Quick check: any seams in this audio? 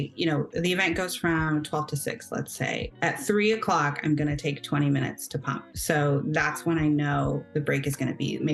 no; 0 cuts

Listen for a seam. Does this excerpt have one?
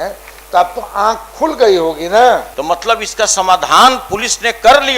yes; 1 cut; at 2.5 s

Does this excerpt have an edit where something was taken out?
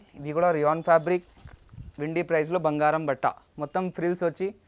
yes; 1 cut; at 3.5 s

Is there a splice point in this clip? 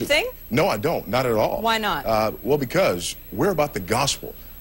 no; 0 cuts

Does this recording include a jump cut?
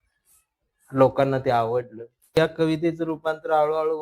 yes; 1 cut; at 2.4 s

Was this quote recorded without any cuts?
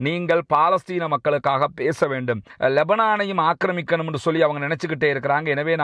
no; 1 cut; at 2.5 s

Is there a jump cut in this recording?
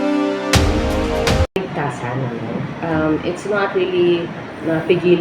yes; 1 cut; at 1.6 s

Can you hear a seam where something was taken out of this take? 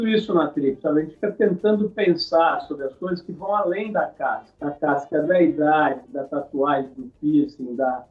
no; 0 cuts

